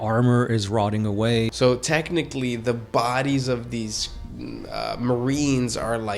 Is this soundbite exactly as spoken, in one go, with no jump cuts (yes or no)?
no